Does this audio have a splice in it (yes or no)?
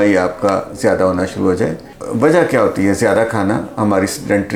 yes